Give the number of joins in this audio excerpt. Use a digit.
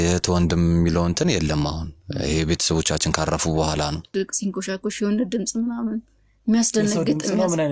1